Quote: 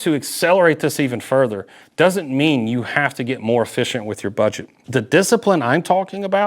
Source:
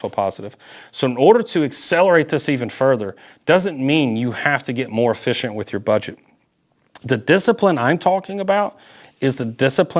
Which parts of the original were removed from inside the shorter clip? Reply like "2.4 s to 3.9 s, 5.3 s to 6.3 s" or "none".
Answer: 6.2 s to 6.9 s